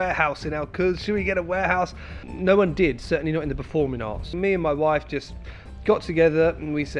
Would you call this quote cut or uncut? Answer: cut